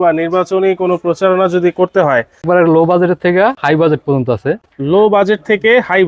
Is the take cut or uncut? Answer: cut